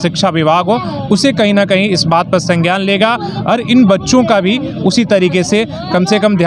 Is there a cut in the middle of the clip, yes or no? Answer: no